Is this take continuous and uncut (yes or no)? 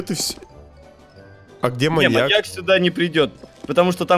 yes